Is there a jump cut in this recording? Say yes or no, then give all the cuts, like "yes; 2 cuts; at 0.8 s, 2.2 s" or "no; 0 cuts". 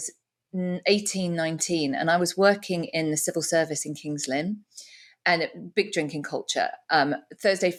no; 0 cuts